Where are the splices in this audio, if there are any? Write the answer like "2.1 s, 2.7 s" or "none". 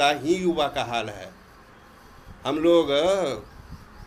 none